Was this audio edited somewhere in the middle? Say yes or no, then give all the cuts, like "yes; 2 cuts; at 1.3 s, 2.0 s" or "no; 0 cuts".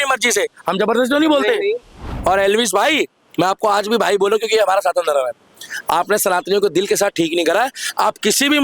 yes; 1 cut; at 2.1 s